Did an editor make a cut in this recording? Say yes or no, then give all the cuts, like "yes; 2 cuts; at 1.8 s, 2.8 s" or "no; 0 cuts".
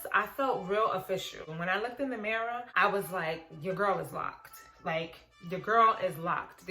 yes; 2 cuts; at 1.4 s, 2.7 s